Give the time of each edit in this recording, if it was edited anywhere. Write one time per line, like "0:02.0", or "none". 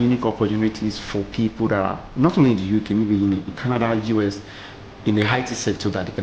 none